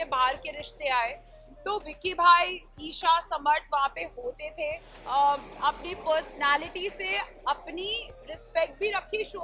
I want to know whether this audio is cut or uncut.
cut